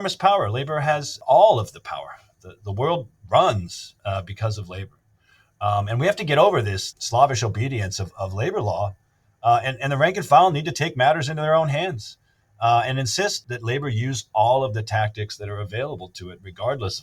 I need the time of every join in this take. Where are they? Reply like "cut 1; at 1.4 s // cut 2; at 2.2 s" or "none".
none

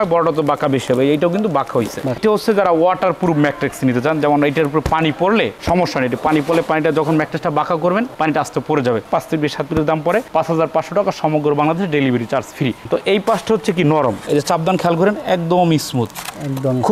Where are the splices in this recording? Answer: cut 1; at 2.2 s // cut 2; at 9.1 s // cut 3; at 12.8 s

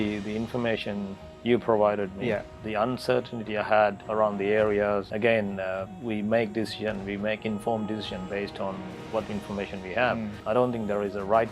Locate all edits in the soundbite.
cut 1; at 2.5 s // cut 2; at 5.1 s // cut 3; at 8.9 s

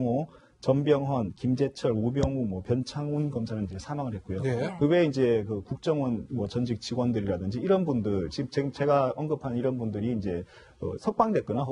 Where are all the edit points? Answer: none

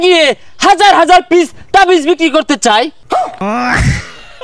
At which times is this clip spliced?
cut 1; at 3.2 s

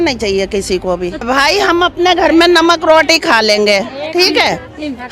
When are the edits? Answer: cut 1; at 1.3 s

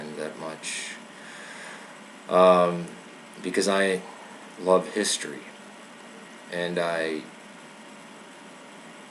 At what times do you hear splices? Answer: none

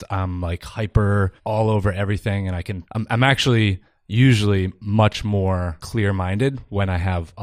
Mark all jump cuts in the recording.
cut 1; at 1.4 s // cut 2; at 2.8 s // cut 3; at 5.8 s

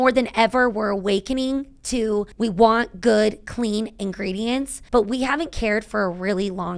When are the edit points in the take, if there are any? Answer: cut 1; at 2.3 s // cut 2; at 4.8 s

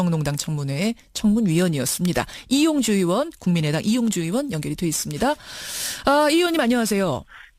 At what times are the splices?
cut 1; at 5.0 s

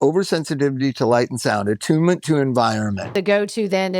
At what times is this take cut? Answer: cut 1; at 3.1 s

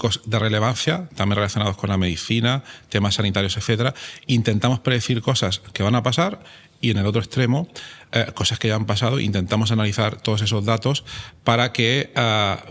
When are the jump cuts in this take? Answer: none

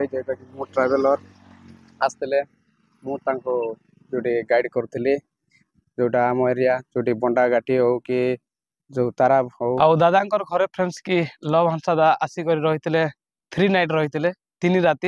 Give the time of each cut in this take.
cut 1; at 9.8 s

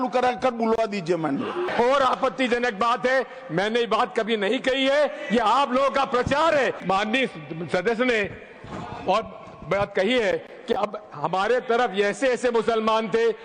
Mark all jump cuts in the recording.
cut 1; at 1.7 s // cut 2; at 6.8 s

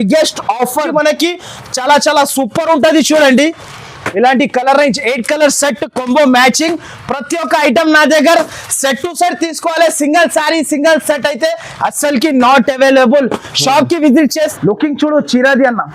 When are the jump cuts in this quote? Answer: cut 1; at 0.9 s // cut 2; at 14.5 s

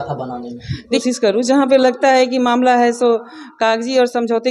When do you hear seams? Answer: cut 1; at 1.0 s

